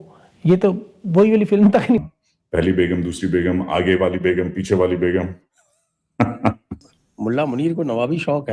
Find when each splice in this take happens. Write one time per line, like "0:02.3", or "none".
0:02.0
0:06.7